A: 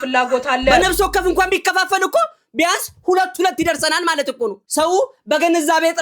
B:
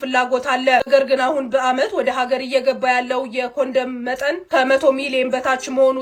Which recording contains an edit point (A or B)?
A